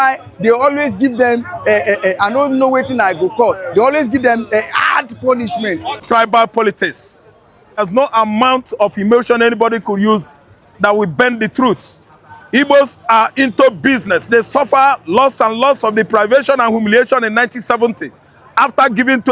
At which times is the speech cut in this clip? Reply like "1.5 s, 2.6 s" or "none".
6.0 s, 7.8 s